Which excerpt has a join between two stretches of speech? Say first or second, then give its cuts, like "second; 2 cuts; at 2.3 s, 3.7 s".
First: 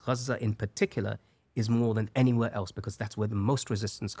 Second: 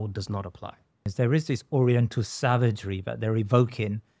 second; 1 cut; at 1.1 s